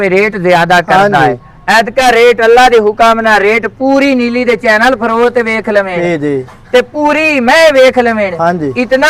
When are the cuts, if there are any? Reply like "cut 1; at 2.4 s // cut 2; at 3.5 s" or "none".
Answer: none